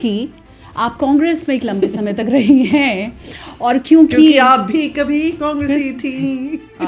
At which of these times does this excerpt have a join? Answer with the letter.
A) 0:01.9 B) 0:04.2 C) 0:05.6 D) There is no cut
D